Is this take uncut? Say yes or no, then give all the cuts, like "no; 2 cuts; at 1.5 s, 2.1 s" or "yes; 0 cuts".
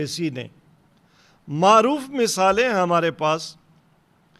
yes; 0 cuts